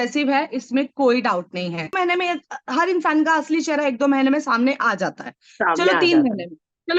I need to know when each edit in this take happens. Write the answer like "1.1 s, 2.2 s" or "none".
1.9 s